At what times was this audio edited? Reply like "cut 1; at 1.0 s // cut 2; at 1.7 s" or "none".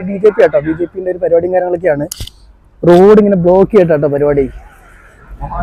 none